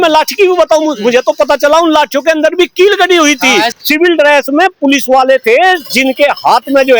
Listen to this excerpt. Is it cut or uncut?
cut